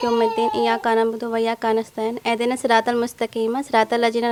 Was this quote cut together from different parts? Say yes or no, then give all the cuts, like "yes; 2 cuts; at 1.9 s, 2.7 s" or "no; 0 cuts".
no; 0 cuts